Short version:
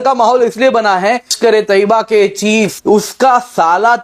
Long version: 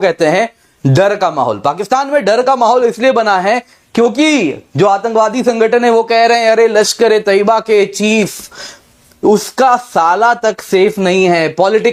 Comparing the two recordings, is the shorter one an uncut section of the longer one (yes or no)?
no